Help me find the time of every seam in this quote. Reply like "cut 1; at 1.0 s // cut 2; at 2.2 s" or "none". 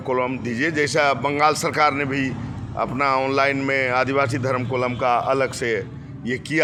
none